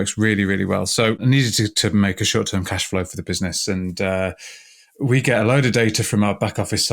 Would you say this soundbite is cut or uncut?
cut